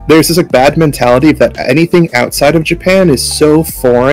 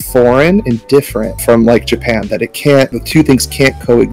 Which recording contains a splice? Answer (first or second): second